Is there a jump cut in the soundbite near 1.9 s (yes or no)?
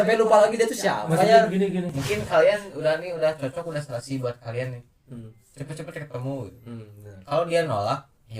yes